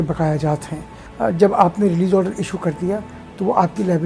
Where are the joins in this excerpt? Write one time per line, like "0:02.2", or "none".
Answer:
0:01.1